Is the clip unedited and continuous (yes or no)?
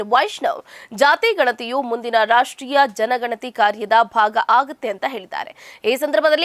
yes